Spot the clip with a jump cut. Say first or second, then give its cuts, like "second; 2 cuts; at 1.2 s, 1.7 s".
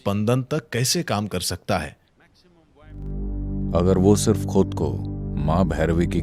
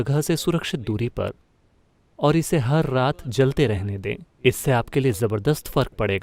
first; 1 cut; at 3.0 s